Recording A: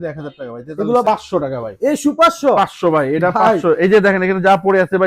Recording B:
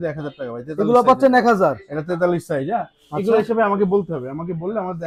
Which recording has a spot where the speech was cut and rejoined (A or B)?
A